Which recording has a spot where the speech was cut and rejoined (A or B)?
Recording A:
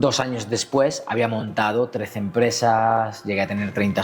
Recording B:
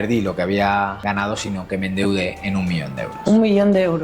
B